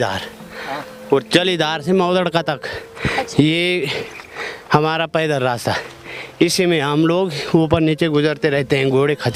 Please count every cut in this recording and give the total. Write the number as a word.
zero